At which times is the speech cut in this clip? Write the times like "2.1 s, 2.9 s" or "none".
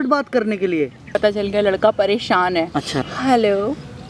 1.2 s, 2.9 s